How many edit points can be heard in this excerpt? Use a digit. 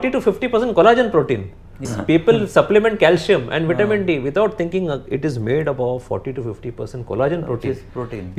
1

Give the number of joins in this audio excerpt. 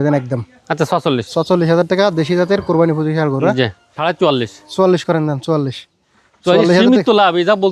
1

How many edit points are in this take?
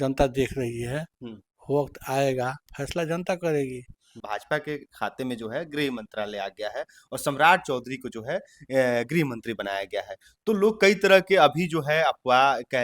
1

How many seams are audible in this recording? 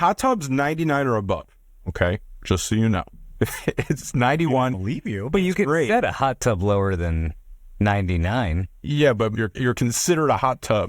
2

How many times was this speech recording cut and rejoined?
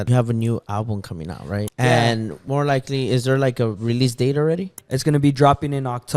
2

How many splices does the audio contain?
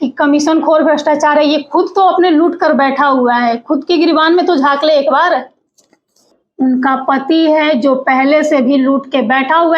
1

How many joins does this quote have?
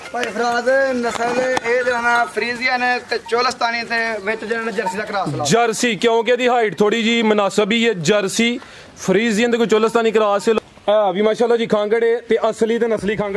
1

